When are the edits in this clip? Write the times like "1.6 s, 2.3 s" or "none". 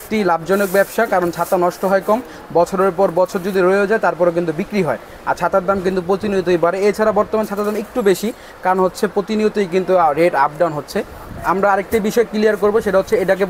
none